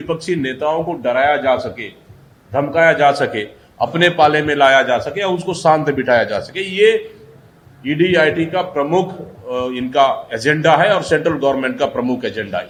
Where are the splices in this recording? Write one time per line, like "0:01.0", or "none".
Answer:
none